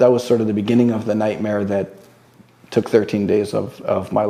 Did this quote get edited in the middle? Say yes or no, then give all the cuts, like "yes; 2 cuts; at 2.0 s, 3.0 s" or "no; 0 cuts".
no; 0 cuts